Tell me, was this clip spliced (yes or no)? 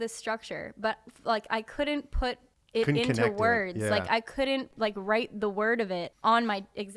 yes